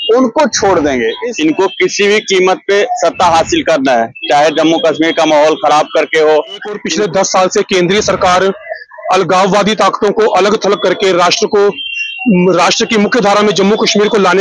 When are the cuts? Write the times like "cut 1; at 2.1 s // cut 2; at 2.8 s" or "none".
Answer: cut 1; at 1.2 s // cut 2; at 6.8 s